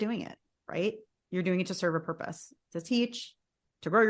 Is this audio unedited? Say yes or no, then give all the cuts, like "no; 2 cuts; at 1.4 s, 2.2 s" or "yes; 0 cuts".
yes; 0 cuts